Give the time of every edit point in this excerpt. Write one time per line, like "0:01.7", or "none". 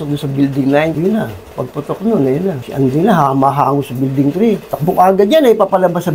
none

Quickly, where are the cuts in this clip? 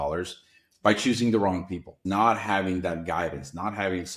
0:01.9

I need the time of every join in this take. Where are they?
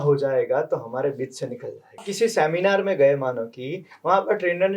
0:02.1

